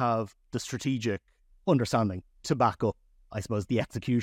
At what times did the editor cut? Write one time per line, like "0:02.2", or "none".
0:01.5
0:03.2